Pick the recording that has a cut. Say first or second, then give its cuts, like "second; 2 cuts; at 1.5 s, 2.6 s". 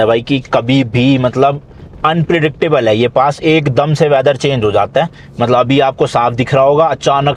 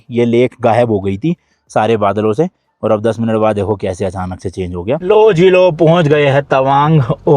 second; 1 cut; at 5.0 s